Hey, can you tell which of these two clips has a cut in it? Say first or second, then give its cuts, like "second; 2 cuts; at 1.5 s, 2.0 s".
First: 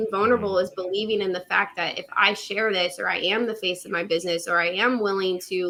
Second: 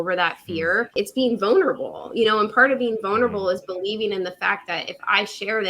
second; 1 cut; at 0.9 s